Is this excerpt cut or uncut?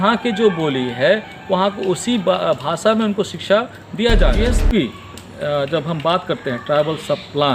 cut